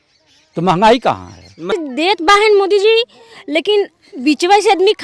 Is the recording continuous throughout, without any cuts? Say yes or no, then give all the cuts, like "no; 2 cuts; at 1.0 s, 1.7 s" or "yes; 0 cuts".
no; 1 cut; at 1.7 s